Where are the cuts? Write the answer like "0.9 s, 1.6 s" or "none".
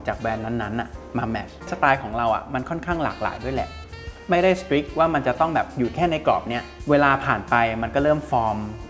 1.7 s, 3.9 s, 6.7 s